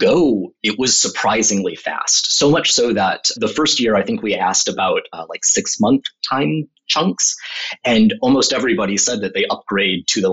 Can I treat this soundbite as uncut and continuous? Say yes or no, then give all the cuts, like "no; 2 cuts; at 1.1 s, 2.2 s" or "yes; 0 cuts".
yes; 0 cuts